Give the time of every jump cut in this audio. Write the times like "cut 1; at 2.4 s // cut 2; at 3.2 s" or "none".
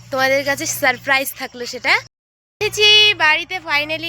cut 1; at 2.4 s

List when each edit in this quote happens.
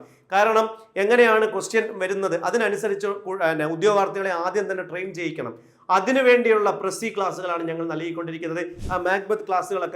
cut 1; at 8.8 s

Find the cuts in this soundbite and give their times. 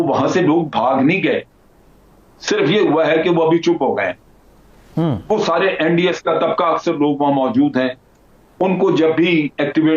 none

